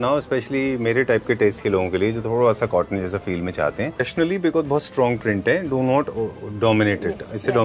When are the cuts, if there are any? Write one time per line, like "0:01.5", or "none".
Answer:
0:04.1